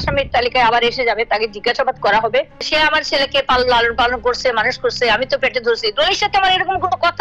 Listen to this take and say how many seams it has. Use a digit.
1